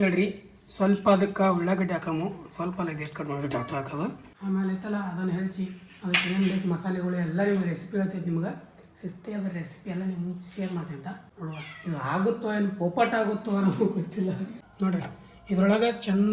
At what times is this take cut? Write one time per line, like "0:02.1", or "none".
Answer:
0:04.2
0:11.3
0:14.8